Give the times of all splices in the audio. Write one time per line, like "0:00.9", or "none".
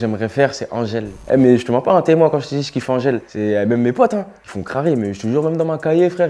0:01.1